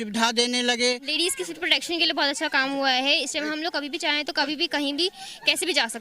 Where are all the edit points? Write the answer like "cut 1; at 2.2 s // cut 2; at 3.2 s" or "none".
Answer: cut 1; at 1.1 s